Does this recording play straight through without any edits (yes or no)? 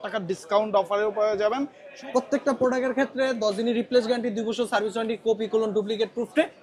no